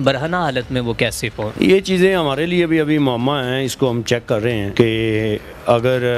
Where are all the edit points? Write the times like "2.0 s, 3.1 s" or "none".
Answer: 1.5 s, 4.7 s